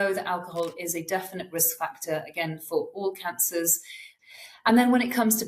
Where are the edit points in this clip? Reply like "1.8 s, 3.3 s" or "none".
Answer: 4.1 s